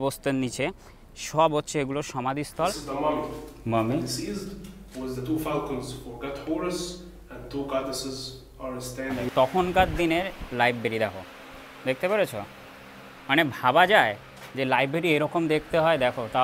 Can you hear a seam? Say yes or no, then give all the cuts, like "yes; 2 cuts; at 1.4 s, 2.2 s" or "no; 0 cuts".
yes; 2 cuts; at 2.8 s, 9.3 s